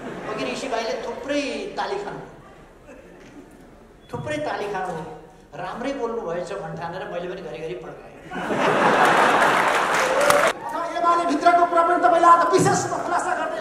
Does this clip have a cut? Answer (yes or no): yes